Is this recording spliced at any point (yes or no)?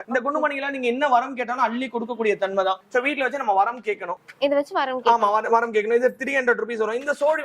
no